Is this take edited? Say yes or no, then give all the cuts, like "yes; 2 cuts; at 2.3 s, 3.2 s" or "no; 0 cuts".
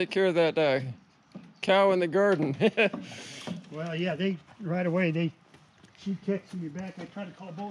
no; 0 cuts